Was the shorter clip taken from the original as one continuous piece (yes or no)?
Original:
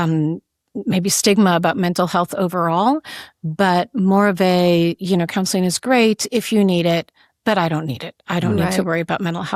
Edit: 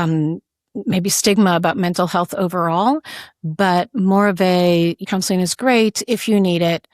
no